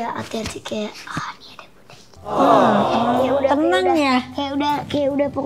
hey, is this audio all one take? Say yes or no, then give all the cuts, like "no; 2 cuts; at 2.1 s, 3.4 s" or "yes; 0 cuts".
yes; 0 cuts